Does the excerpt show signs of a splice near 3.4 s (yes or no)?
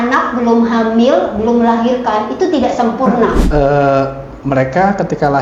yes